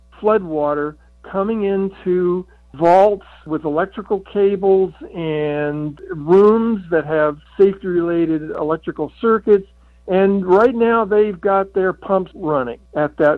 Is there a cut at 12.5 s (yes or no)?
yes